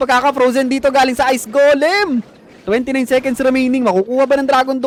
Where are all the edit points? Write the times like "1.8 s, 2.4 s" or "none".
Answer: none